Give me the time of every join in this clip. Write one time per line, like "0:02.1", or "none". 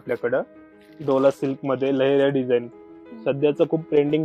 none